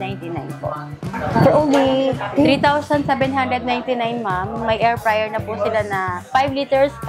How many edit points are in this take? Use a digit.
1